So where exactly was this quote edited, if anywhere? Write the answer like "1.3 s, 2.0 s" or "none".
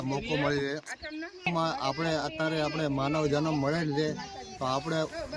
1.5 s